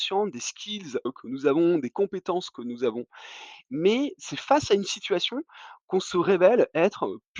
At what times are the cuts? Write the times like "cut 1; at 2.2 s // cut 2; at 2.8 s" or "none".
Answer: cut 1; at 1.1 s